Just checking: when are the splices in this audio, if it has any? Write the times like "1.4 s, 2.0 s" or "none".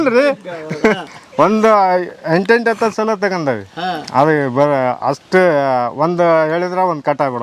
none